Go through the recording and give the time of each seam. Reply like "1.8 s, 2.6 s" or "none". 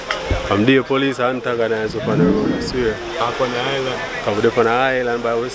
none